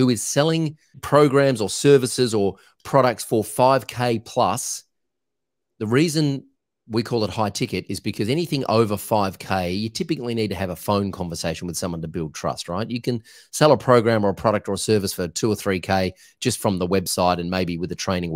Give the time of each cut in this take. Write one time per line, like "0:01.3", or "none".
0:01.0